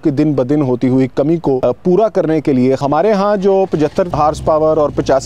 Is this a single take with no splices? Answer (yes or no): no